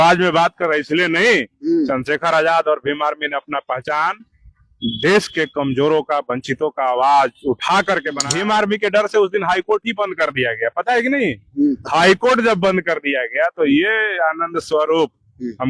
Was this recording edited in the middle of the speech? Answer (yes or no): yes